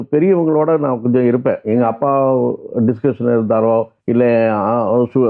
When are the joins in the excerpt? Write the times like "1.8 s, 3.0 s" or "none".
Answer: 4.0 s